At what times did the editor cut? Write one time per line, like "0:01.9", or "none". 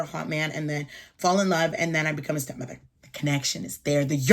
0:02.9